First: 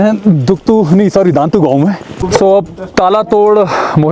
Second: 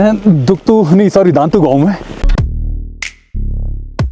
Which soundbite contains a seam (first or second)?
first